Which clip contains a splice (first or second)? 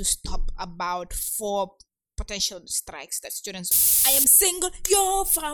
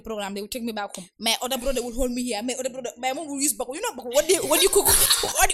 first